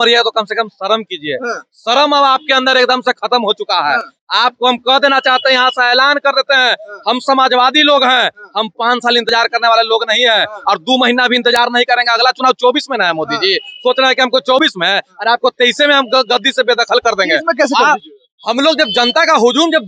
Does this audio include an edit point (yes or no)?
no